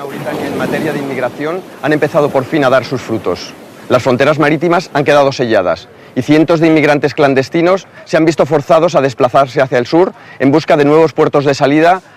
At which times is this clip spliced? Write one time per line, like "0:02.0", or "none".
none